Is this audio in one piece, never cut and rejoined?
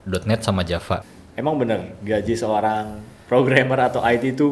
no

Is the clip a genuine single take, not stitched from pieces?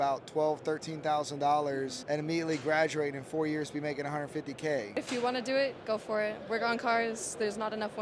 no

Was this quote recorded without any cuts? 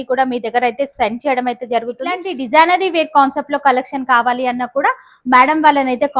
no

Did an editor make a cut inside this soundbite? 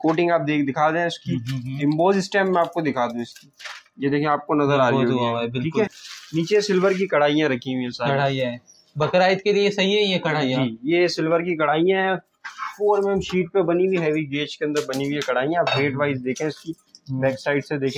yes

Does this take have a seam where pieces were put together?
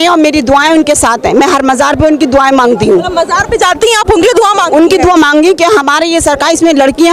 no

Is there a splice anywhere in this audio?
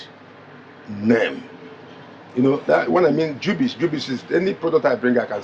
no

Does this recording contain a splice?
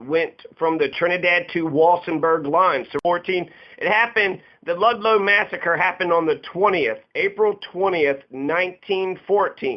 yes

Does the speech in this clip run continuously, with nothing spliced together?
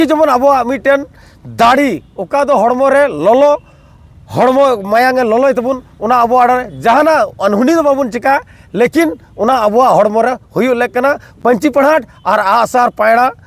yes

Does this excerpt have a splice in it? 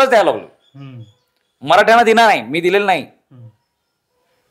no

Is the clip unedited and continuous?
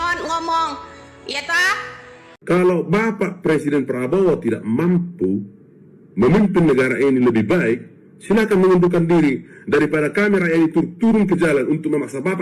no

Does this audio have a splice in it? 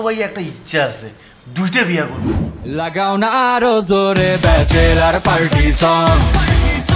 yes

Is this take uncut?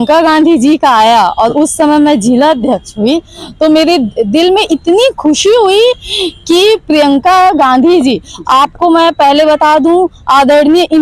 yes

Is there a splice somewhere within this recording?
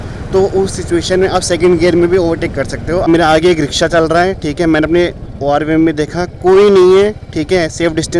yes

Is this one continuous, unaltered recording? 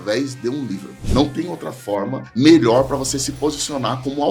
no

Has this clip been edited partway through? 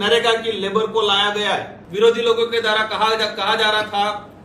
yes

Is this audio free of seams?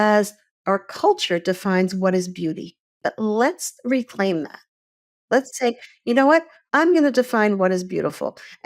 no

